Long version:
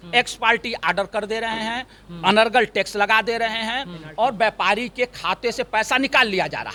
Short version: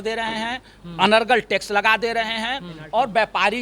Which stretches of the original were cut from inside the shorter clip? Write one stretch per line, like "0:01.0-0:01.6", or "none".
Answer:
none